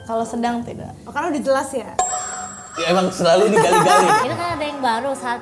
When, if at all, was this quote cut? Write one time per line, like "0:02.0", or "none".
0:04.2